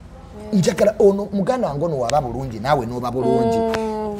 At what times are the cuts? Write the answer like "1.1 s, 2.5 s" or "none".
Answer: none